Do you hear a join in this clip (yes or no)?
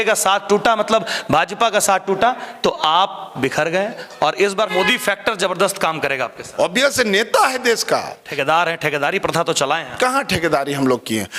yes